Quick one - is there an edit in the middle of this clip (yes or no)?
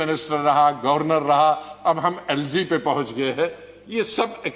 no